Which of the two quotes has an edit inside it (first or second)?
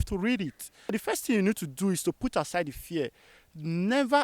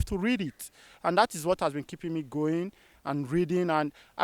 first